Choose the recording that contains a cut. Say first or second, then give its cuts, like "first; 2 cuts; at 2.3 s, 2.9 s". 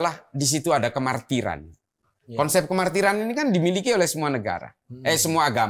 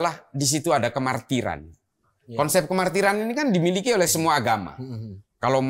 second; 1 cut; at 4.1 s